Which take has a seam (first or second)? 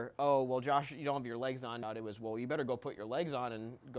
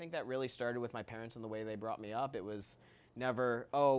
first